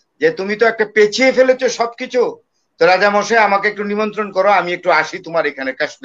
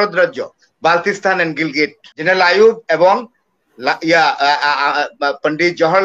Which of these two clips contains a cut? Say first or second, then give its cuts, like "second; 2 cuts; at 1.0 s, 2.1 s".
second; 1 cut; at 2.1 s